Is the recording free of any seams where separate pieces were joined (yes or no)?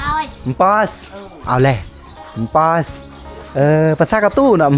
yes